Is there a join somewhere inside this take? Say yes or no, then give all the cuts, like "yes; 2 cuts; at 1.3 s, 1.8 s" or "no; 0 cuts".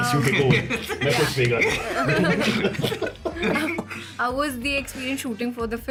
no; 0 cuts